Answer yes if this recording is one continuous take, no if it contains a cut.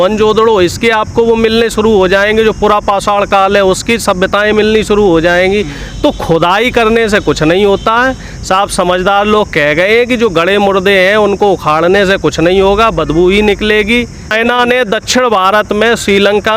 no